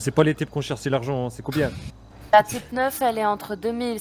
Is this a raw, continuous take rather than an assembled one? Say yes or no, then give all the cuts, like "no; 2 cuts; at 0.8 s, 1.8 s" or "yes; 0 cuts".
yes; 0 cuts